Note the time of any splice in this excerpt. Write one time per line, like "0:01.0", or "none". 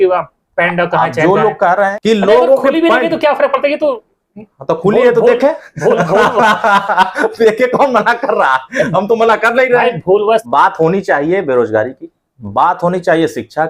0:01.9
0:10.4